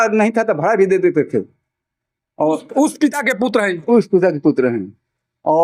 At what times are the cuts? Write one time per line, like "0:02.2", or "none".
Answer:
none

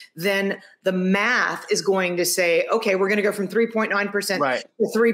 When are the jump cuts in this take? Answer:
none

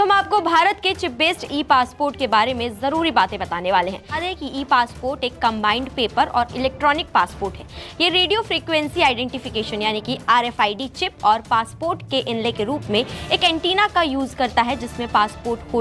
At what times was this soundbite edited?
0:04.2

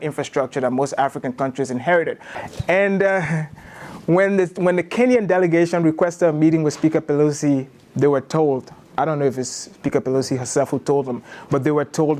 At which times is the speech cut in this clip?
0:02.4

